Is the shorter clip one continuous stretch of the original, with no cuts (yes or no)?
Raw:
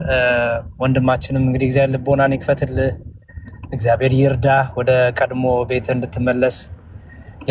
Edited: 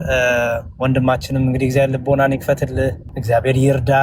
no